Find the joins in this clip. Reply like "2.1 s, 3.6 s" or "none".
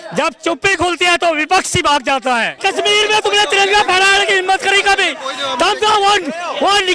2.6 s